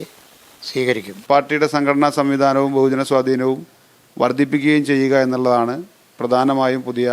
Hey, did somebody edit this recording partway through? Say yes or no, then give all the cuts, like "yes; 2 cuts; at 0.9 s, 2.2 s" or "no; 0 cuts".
yes; 1 cut; at 1.2 s